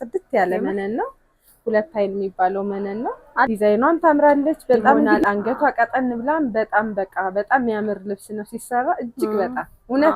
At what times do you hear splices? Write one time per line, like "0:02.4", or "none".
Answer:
0:03.5
0:05.2